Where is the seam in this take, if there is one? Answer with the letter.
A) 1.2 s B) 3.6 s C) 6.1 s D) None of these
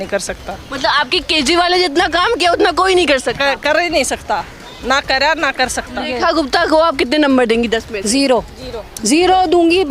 C